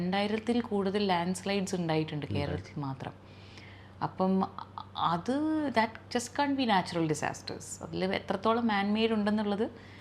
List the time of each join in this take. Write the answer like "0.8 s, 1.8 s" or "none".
none

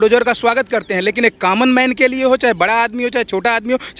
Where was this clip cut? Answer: none

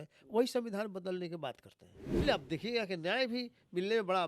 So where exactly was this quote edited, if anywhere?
2.2 s

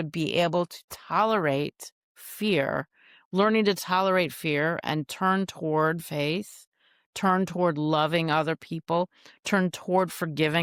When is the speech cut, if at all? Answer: none

